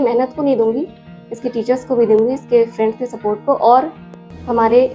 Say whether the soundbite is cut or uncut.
uncut